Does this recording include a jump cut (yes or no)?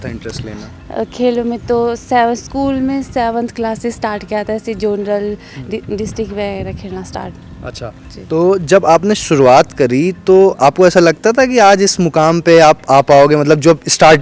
no